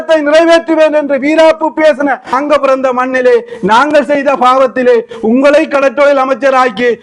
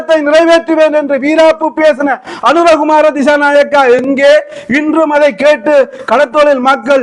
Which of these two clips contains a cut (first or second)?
first